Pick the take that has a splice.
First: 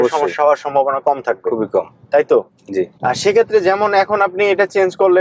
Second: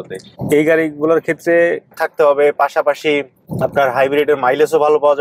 second; 1 cut; at 2.0 s

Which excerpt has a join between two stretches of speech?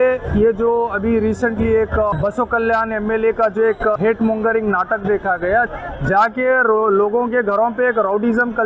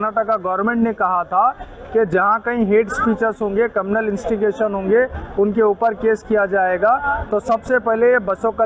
first; 3 cuts; at 2.1 s, 4.0 s, 5.7 s

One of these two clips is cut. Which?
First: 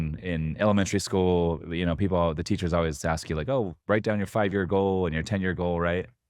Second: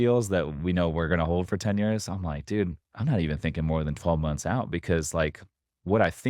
second; 1 cut; at 2.9 s

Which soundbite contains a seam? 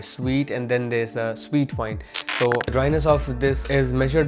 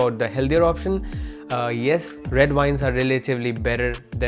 first; 1 cut; at 2.7 s

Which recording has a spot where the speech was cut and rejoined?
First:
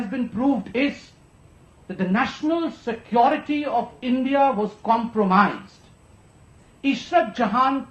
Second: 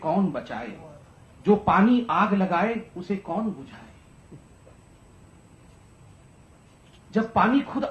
first; 1 cut; at 3.9 s

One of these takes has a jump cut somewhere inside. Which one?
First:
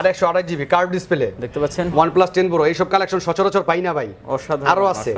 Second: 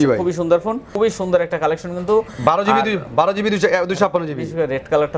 second; 1 cut; at 1.0 s

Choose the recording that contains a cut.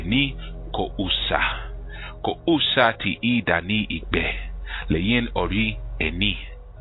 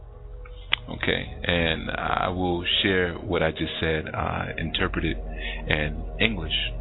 second; 1 cut; at 2.0 s

